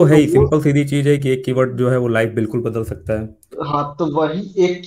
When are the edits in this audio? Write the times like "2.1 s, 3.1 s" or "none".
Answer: none